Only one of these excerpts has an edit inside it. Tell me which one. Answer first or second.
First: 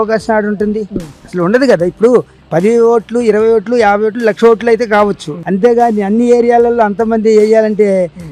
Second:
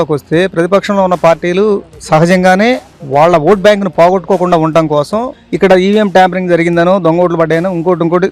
second